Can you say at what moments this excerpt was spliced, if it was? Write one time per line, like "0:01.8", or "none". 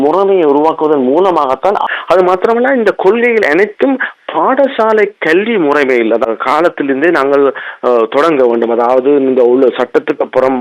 0:01.8
0:06.2